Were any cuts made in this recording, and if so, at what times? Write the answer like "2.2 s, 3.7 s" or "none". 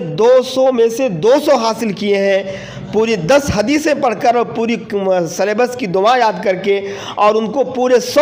none